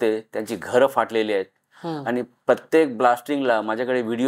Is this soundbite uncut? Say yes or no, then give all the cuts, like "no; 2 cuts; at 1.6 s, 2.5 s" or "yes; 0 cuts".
yes; 0 cuts